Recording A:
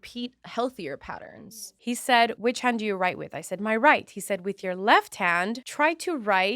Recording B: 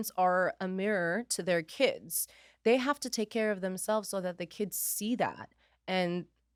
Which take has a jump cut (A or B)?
A